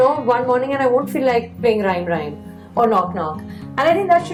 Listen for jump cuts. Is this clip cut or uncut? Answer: uncut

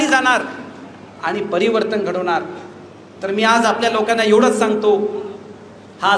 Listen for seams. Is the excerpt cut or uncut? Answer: uncut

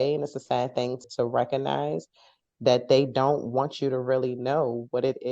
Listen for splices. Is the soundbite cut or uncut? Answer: cut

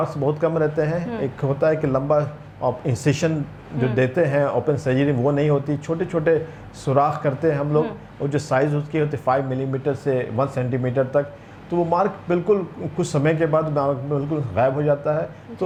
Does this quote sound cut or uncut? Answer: uncut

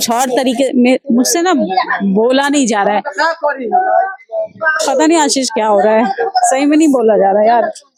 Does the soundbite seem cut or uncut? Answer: uncut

